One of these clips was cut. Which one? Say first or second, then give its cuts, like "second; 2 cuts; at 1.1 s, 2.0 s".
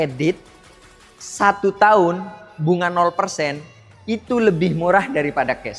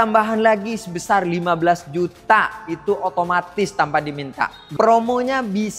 second; 1 cut; at 4.7 s